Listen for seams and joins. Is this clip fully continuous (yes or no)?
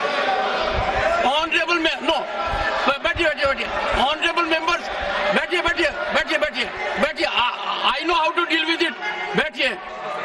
yes